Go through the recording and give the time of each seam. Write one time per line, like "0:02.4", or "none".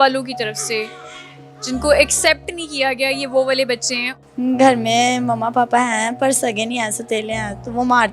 0:04.0